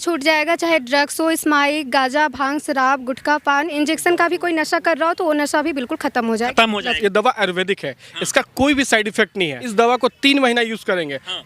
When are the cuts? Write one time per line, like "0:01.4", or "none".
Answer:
0:03.7
0:07.0
0:09.6